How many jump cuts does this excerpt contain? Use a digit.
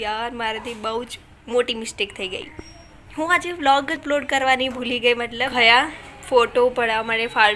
1